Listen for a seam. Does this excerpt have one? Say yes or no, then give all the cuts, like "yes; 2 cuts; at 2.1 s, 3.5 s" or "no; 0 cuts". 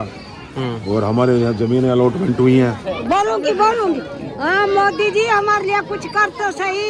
yes; 1 cut; at 2.9 s